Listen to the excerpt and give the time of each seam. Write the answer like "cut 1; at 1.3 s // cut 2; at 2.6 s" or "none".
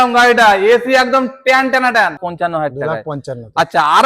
cut 1; at 2.2 s